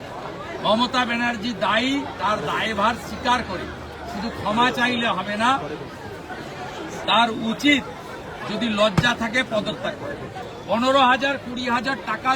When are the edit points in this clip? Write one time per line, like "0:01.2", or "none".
0:10.4